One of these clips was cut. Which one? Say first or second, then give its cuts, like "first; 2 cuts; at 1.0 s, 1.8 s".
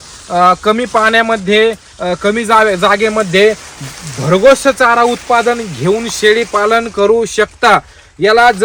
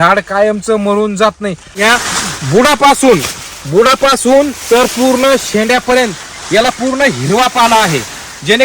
second; 1 cut; at 1.8 s